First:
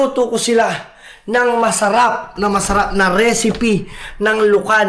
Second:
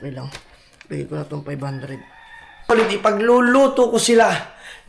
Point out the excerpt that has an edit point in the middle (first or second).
second